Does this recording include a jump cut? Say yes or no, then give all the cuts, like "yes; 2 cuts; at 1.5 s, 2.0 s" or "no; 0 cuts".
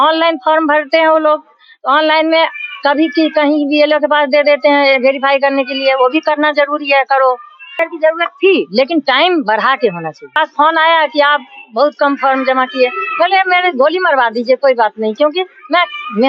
yes; 2 cuts; at 7.8 s, 10.3 s